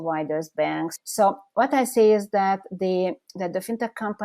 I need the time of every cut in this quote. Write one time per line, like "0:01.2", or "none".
0:01.0

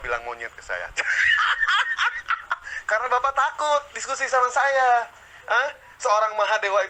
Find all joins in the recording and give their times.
none

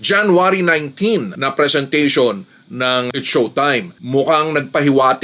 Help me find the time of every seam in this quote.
0:04.0

